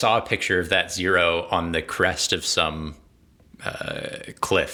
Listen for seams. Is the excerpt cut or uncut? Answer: uncut